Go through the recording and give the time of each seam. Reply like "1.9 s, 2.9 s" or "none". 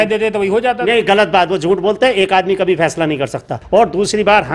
3.6 s